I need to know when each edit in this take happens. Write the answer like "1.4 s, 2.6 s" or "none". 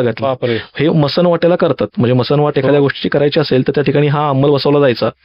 none